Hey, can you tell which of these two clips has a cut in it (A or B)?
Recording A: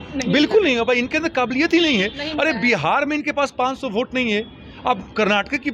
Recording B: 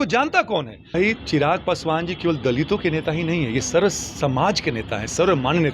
B